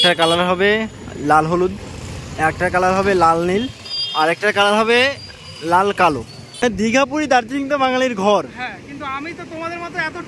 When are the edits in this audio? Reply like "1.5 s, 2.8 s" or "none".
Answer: 6.6 s